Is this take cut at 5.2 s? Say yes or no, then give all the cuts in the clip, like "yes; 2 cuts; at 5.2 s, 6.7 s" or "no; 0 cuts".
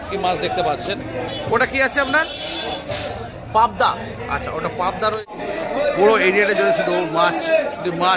yes; 1 cut; at 5.2 s